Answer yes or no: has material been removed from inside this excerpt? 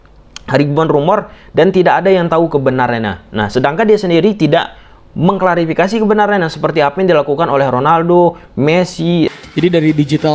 yes